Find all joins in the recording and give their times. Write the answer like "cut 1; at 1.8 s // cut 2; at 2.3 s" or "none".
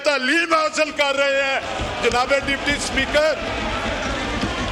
none